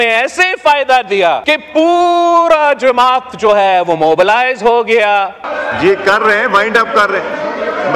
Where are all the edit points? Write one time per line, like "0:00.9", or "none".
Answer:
0:01.4
0:05.5